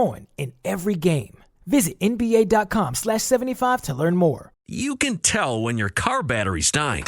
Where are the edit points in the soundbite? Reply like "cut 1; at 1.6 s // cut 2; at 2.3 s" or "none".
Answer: cut 1; at 4.7 s